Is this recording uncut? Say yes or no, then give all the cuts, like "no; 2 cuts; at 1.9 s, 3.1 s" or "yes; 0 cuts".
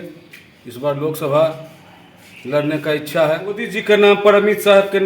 no; 1 cut; at 3.7 s